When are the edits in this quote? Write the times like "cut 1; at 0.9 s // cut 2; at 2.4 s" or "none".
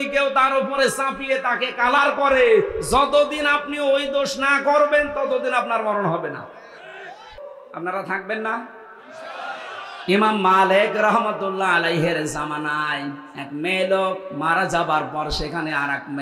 cut 1; at 7.4 s